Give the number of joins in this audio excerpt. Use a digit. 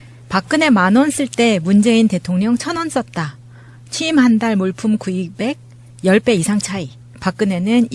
0